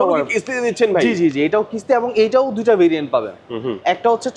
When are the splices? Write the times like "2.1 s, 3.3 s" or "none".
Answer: none